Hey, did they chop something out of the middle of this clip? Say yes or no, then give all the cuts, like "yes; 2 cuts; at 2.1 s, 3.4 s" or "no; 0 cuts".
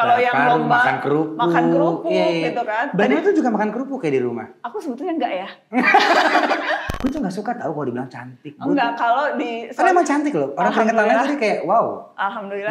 yes; 1 cut; at 6.9 s